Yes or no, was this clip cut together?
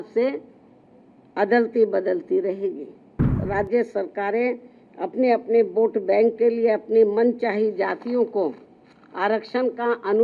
yes